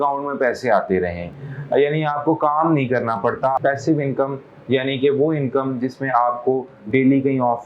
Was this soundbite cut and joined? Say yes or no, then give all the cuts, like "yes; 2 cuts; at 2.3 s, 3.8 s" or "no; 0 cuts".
yes; 1 cut; at 3.6 s